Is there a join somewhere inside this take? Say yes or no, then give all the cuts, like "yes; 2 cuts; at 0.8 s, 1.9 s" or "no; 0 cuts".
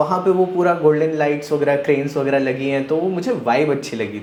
no; 0 cuts